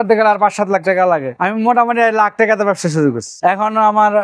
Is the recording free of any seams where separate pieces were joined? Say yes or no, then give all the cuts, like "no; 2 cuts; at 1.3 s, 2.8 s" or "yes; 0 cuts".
no; 1 cut; at 1.3 s